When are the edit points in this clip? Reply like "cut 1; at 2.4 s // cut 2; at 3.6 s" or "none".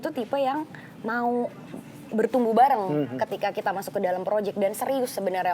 none